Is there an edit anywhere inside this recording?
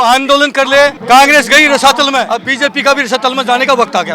yes; 2 cuts; at 1.0 s, 2.4 s

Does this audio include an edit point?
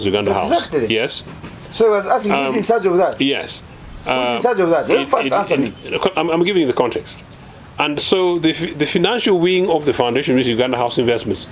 no; 0 cuts

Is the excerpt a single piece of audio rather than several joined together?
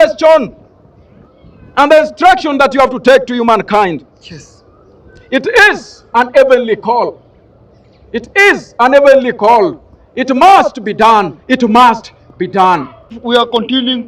no; 1 cut; at 13.2 s

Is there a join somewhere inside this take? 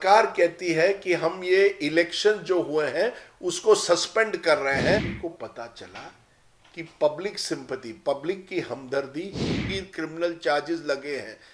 yes; 2 cuts; at 5.1 s, 9.6 s

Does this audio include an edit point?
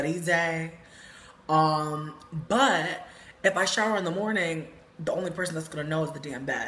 yes; 1 cut; at 2.2 s

